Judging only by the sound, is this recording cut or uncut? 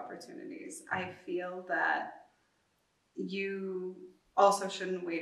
cut